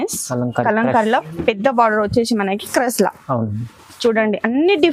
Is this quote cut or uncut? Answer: uncut